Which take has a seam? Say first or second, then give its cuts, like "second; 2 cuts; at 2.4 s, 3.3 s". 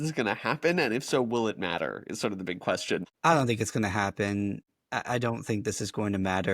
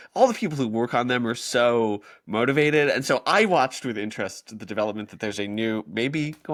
first; 2 cuts; at 3.1 s, 4.7 s